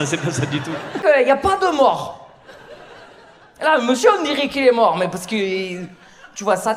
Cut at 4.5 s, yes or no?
no